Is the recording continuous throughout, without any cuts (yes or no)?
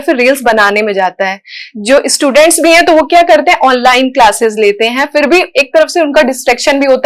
yes